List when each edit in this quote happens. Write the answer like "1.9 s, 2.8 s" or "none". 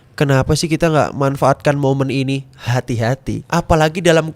3.3 s